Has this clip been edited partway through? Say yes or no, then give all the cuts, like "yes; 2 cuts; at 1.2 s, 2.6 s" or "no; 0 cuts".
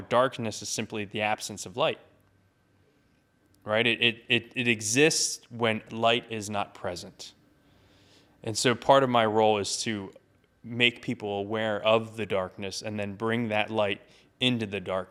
no; 0 cuts